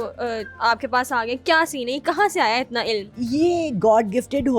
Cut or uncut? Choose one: uncut